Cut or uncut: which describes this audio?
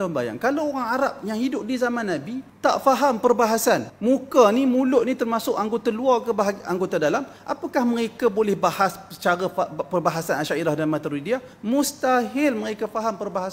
cut